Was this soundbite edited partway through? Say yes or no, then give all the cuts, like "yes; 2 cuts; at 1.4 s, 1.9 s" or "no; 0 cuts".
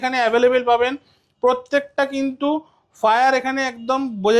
no; 0 cuts